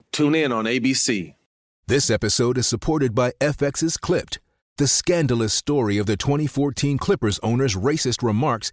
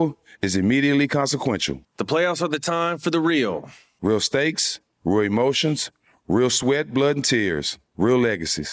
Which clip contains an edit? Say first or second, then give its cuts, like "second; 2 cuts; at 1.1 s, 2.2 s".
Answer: first; 1 cut; at 1.4 s